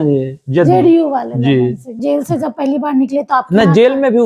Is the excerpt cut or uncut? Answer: cut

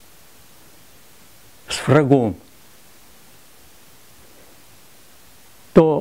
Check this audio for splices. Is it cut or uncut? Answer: uncut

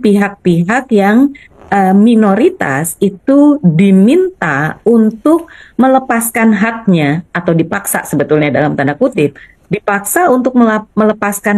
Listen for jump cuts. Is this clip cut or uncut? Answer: uncut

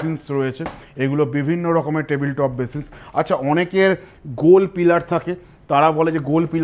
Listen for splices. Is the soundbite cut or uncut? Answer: uncut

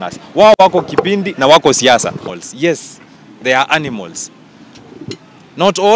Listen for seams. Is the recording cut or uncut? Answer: cut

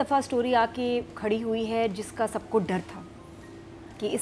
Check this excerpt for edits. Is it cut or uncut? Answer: uncut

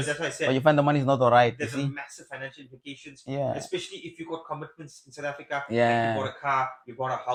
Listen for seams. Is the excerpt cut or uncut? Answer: uncut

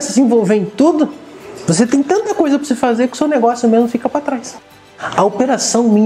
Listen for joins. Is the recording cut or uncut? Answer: cut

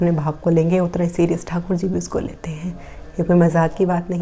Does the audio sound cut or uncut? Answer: uncut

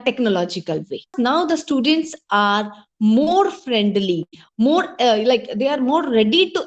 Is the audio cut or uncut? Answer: cut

